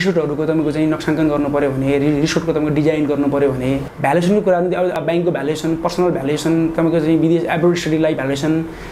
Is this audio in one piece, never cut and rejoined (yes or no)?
no